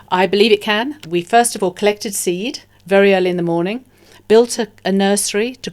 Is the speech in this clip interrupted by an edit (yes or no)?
yes